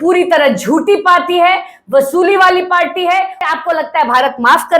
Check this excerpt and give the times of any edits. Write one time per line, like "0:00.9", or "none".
0:03.4

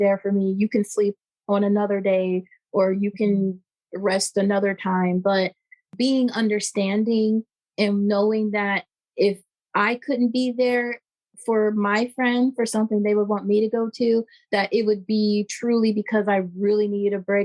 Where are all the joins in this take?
none

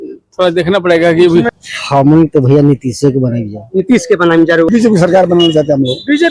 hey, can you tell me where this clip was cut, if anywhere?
0:01.6
0:04.7

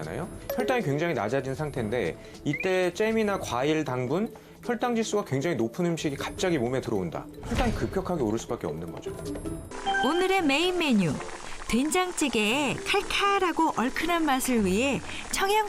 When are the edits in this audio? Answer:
0:09.7

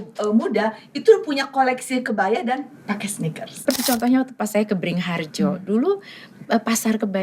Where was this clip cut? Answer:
0:03.5

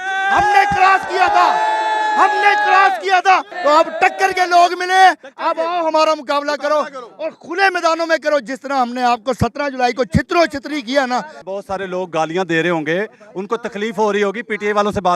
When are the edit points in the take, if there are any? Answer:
0:03.5
0:11.4

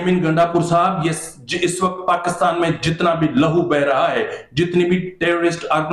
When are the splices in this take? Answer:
none

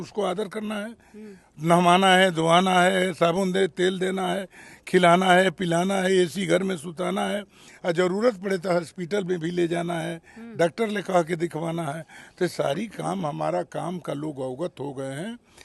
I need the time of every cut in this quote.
none

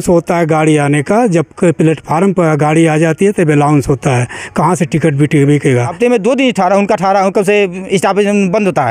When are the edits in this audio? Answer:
0:05.9

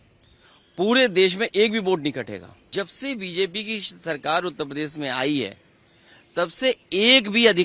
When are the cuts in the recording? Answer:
0:02.7

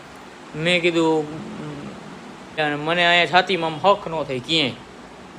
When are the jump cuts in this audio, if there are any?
0:02.6

